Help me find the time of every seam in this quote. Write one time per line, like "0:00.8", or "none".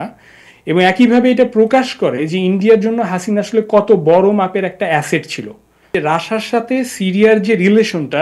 0:05.9